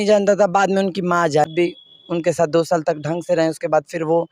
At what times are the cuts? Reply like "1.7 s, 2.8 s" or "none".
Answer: 1.5 s